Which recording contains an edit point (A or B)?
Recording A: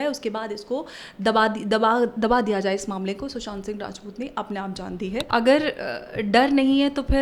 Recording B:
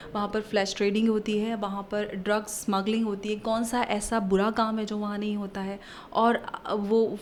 A